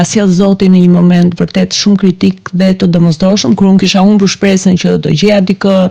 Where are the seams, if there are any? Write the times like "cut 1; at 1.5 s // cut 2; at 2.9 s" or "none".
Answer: none